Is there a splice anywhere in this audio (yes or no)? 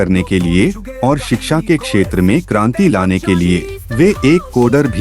yes